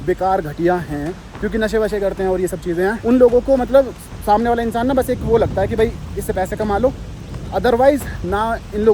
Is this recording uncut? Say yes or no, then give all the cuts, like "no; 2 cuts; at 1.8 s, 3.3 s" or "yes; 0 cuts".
yes; 0 cuts